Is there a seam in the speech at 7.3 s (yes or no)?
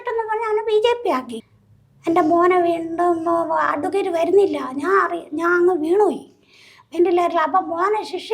no